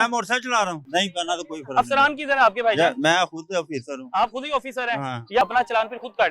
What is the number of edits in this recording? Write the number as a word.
two